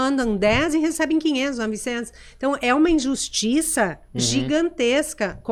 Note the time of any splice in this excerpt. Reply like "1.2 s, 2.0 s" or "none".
none